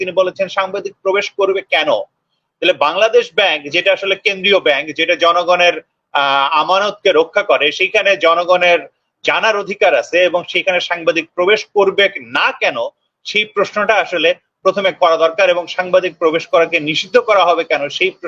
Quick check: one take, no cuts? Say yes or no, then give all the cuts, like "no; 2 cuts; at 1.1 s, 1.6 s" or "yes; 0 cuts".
yes; 0 cuts